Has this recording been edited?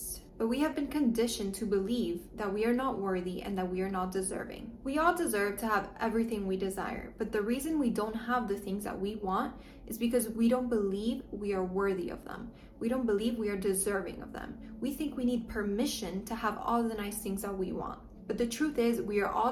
no; 0 cuts

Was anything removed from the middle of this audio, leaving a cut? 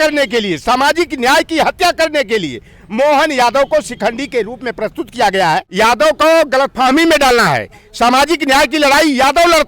yes; 1 cut; at 5.7 s

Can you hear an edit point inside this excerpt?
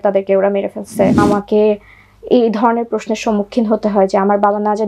yes; 1 cut; at 1.2 s

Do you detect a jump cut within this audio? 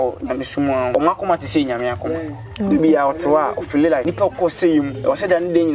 yes; 2 cuts; at 0.9 s, 4.1 s

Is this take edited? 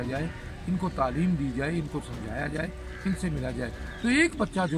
no; 0 cuts

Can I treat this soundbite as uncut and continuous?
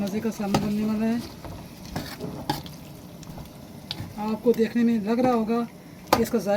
yes; 0 cuts

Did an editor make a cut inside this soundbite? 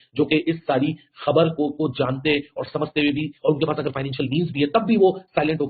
no; 0 cuts

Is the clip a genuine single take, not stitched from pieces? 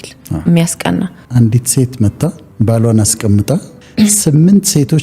no; 2 cuts; at 1.2 s, 2.4 s

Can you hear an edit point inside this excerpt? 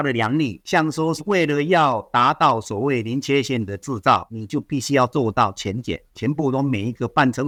no; 0 cuts

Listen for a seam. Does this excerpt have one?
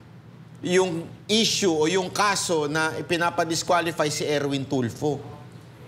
no; 0 cuts

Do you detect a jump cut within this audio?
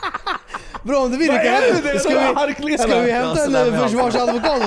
no; 0 cuts

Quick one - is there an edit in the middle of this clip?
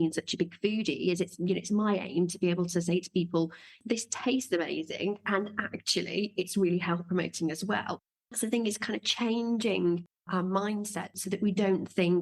yes; 1 cut; at 11.2 s

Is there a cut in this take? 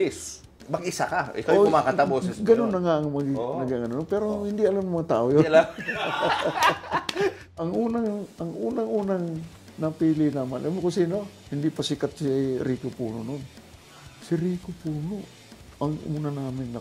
yes; 1 cut; at 7.4 s

